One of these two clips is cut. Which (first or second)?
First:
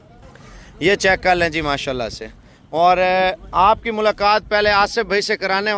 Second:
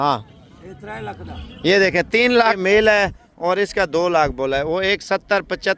second